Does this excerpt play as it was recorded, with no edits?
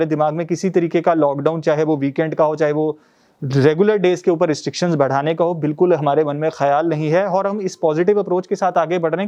yes; 0 cuts

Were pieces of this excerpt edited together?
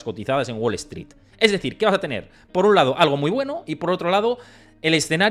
no; 0 cuts

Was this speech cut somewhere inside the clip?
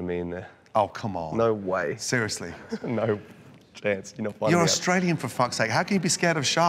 no; 0 cuts

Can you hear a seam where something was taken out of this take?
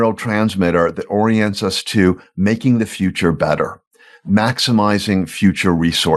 no; 0 cuts

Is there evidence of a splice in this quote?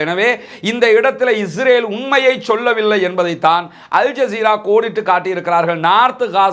no; 0 cuts

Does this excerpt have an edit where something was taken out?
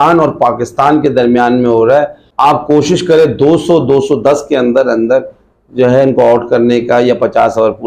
yes; 1 cut; at 2.2 s

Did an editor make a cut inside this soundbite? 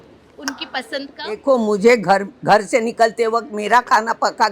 yes; 1 cut; at 1.4 s

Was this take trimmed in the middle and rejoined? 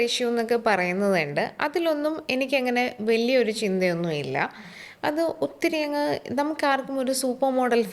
no; 0 cuts

